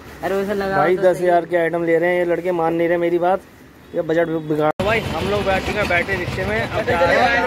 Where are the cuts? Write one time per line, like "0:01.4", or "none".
0:04.7